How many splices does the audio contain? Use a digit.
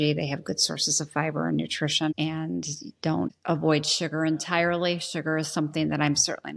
2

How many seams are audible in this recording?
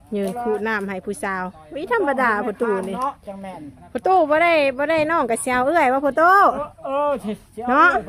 0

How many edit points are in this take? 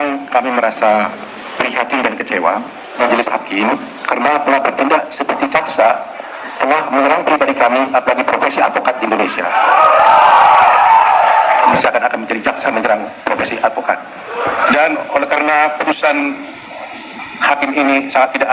3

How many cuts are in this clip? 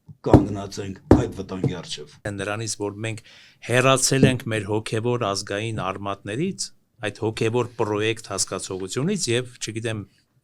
1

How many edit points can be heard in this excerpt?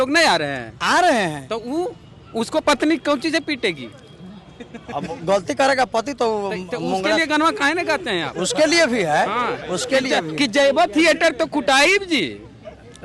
0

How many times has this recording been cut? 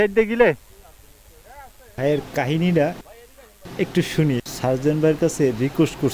1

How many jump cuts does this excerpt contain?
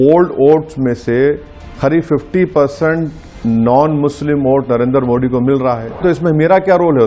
1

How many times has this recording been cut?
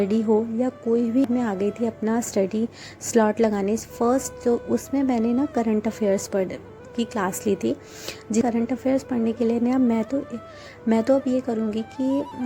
2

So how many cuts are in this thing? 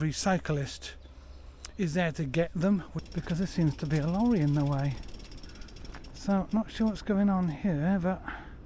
1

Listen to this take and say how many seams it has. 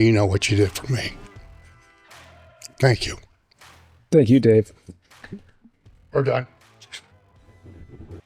0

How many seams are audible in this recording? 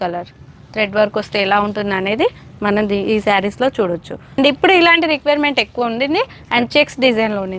1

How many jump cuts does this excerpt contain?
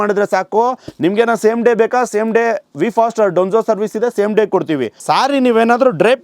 1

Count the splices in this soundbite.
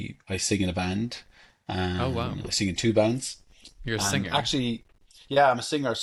0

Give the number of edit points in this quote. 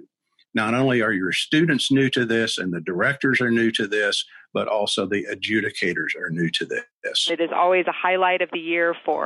1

